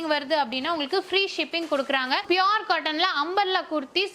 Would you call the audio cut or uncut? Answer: cut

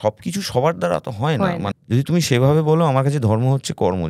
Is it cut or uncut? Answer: cut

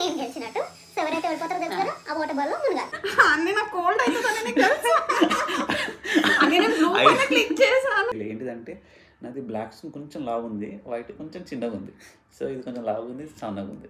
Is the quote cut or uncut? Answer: cut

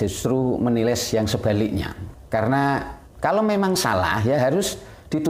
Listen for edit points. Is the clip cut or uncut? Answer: cut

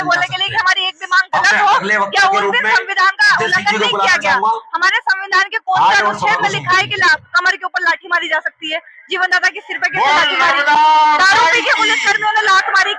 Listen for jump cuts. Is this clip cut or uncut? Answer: uncut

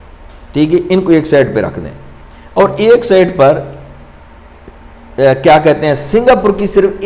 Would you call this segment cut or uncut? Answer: uncut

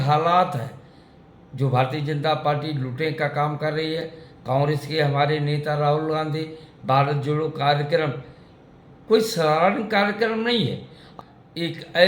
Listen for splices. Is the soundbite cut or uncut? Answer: cut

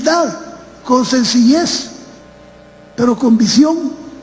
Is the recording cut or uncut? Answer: uncut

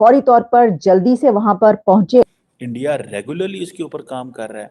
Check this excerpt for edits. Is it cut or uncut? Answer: cut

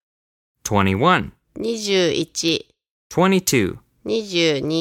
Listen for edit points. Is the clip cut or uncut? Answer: cut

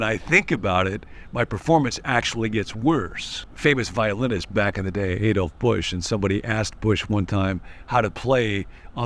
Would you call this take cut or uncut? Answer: cut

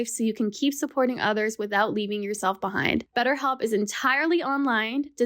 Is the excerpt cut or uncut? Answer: cut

